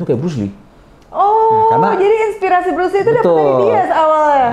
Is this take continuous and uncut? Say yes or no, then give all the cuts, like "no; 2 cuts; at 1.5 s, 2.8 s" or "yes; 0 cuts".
yes; 0 cuts